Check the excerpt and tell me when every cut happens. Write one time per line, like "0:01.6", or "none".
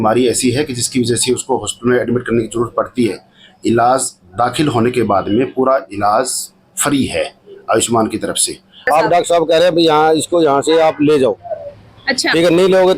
0:08.8